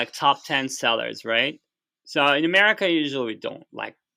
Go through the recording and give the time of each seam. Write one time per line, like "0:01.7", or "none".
none